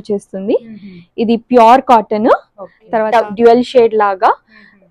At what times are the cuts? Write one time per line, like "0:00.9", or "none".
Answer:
0:03.0